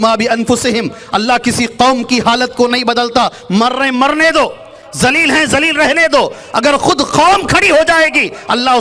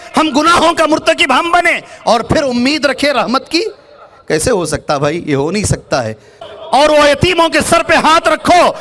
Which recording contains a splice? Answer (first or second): second